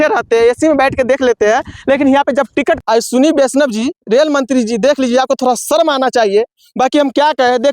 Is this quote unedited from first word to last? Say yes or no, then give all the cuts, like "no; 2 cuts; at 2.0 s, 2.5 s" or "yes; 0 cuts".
no; 1 cut; at 2.8 s